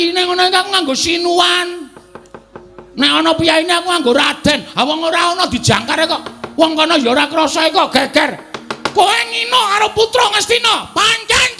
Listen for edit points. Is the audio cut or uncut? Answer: uncut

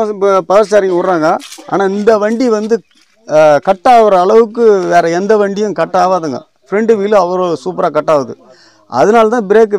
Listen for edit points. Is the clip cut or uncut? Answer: uncut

